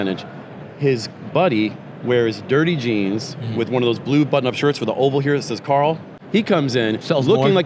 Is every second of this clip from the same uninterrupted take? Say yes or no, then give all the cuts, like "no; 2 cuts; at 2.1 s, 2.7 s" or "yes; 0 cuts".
no; 1 cut; at 6.1 s